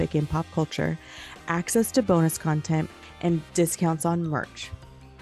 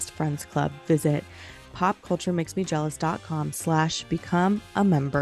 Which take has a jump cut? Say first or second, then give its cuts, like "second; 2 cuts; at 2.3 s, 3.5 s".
first; 1 cut; at 3.0 s